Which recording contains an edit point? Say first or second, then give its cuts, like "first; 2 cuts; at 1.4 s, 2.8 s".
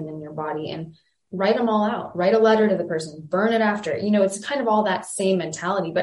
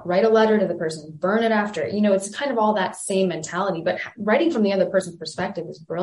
first; 1 cut; at 1.2 s